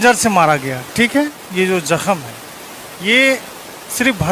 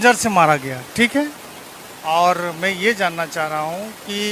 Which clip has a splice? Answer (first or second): first